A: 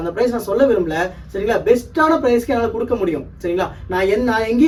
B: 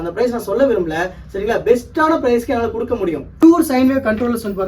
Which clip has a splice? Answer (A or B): B